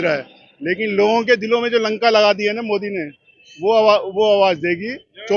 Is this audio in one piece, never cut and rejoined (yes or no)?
yes